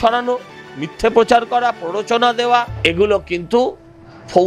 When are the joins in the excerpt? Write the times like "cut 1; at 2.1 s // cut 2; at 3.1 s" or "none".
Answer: cut 1; at 2.7 s

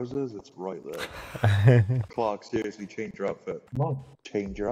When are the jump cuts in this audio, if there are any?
none

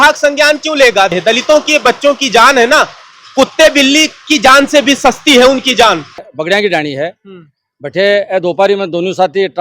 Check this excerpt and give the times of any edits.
cut 1; at 1.1 s // cut 2; at 6.3 s

